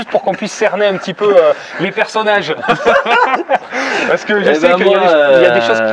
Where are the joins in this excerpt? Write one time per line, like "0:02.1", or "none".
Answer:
none